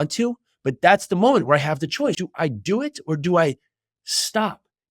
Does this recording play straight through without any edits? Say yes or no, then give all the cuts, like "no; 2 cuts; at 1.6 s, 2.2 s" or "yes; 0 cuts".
no; 1 cut; at 2.2 s